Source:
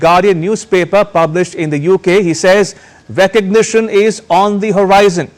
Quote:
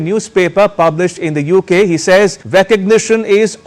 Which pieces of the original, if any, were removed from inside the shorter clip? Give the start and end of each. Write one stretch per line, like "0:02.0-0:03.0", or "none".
0:02.8-0:03.0